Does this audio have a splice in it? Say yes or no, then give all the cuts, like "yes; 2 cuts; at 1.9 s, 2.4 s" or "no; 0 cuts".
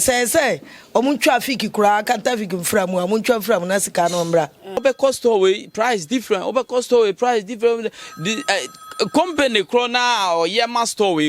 yes; 1 cut; at 4.8 s